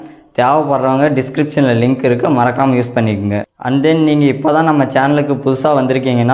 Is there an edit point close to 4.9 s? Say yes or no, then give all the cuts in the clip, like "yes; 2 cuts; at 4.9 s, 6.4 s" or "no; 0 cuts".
no; 1 cut; at 3.5 s